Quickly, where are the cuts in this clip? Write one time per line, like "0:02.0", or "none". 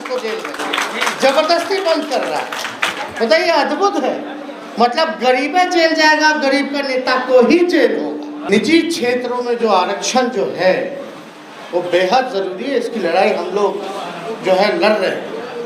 0:08.4